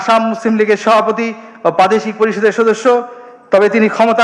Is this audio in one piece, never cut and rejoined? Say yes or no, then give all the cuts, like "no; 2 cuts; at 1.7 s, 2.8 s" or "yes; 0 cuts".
yes; 0 cuts